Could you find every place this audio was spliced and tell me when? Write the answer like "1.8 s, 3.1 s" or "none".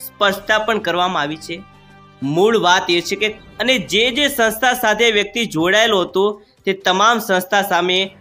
3.3 s